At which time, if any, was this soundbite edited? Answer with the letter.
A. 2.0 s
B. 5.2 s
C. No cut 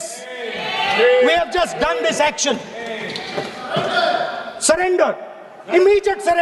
C